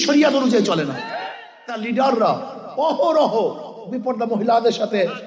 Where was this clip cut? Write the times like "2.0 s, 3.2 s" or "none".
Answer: 1.1 s

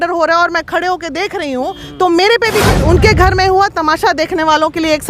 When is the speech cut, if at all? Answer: 2.8 s

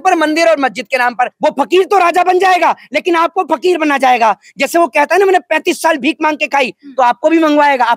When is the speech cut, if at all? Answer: 1.3 s

